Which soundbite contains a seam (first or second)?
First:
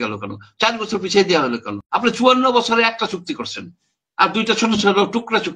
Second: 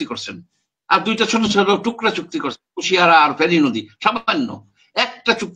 first